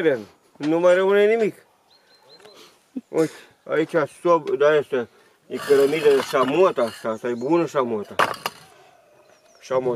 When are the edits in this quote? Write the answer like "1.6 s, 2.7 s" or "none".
none